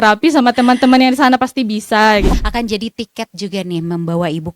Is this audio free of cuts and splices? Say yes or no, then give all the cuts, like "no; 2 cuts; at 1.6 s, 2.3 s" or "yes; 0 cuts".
no; 1 cut; at 2.3 s